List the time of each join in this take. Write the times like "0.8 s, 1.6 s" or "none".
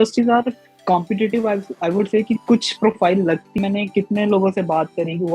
3.5 s